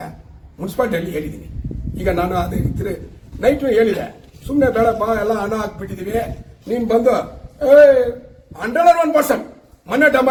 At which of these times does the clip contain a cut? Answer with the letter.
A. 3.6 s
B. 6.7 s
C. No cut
C